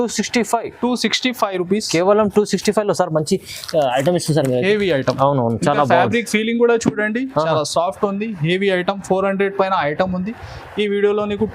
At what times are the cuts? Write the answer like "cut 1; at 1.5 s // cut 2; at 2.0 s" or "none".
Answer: none